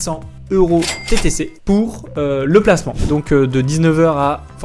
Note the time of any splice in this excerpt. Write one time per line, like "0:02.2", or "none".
0:03.0